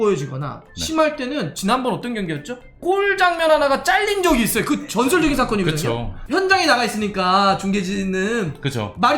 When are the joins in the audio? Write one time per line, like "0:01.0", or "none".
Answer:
0:06.1